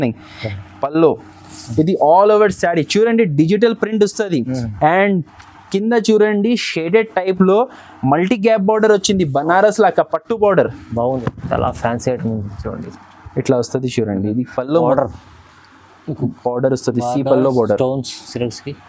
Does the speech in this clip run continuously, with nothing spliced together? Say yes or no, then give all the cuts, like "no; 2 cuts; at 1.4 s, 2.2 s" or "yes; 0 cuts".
no; 1 cut; at 11.3 s